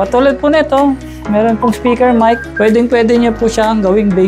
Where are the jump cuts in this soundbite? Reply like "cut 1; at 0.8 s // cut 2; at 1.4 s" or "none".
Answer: cut 1; at 2.5 s

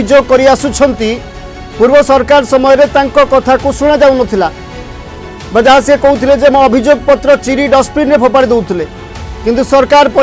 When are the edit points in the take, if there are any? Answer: none

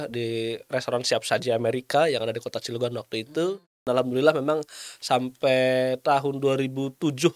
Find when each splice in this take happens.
cut 1; at 3.8 s

